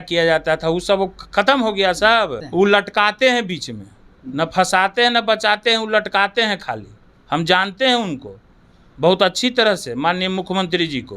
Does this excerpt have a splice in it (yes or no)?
yes